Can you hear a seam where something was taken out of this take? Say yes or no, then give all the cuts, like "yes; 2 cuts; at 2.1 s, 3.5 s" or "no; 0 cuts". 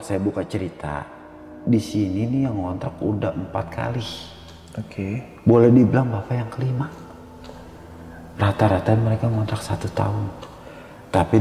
no; 0 cuts